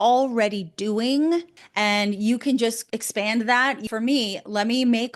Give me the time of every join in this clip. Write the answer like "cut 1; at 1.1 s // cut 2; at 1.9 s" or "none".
cut 1; at 1.6 s // cut 2; at 3.9 s